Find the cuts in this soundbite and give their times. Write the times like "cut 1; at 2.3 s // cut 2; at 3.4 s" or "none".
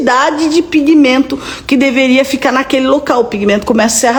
none

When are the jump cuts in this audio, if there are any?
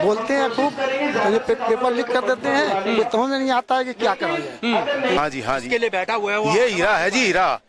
cut 1; at 5.2 s

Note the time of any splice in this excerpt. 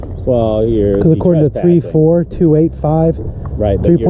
none

